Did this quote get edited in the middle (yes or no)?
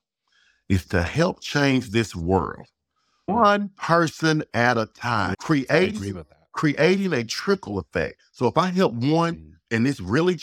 yes